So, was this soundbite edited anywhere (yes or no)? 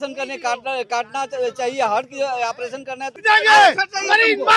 yes